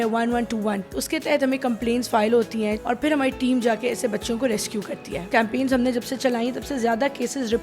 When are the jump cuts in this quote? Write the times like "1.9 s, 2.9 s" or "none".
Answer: 0.9 s, 2.8 s, 5.3 s